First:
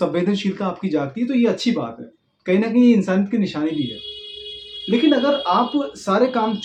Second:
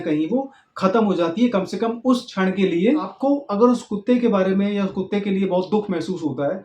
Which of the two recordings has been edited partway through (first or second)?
second